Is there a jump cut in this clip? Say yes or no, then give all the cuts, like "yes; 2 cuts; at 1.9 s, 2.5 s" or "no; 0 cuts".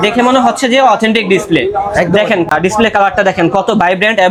no; 0 cuts